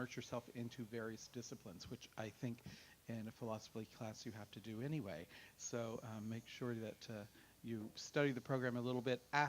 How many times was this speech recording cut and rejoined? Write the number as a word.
one